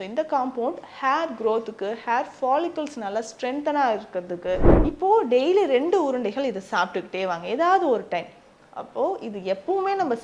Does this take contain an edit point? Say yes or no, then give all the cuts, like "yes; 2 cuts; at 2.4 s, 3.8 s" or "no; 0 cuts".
yes; 1 cut; at 4.7 s